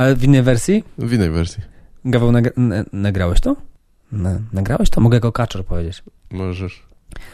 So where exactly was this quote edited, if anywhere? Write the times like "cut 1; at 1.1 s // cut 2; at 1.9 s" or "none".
cut 1; at 4.0 s

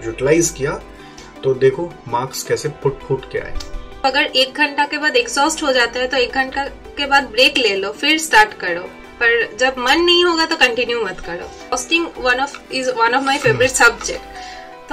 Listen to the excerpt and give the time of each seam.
cut 1; at 4.0 s // cut 2; at 11.7 s

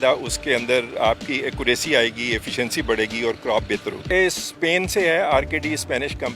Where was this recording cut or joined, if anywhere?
cut 1; at 4.1 s

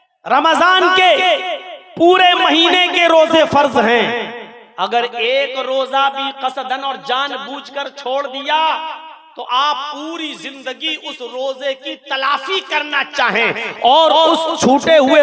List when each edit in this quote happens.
none

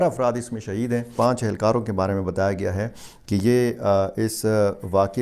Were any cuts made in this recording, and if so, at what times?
cut 1; at 1.1 s

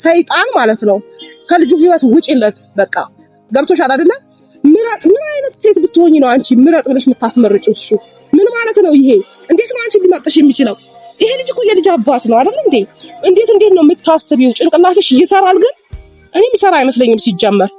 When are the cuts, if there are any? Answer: none

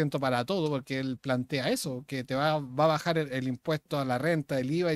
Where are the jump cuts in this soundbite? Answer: none

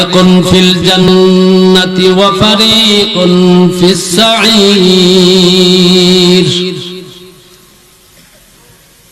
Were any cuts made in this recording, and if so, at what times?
cut 1; at 1.0 s

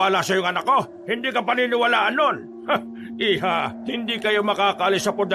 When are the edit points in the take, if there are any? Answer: cut 1; at 1.0 s // cut 2; at 2.5 s // cut 3; at 3.8 s

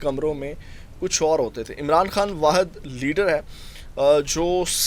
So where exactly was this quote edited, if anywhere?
none

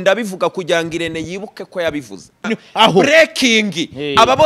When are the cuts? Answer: cut 1; at 2.6 s

